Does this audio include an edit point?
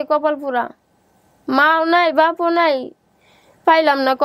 no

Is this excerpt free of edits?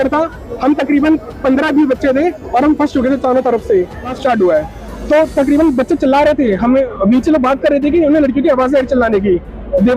no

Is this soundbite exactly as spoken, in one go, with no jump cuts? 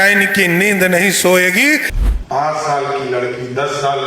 no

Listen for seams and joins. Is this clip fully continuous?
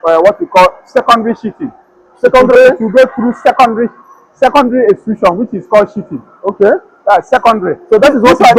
yes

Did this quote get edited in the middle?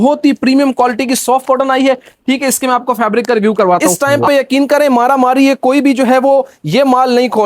yes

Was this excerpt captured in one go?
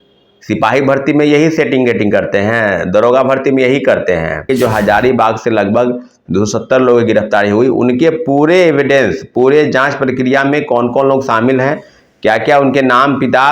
no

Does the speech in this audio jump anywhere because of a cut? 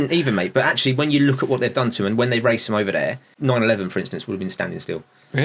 yes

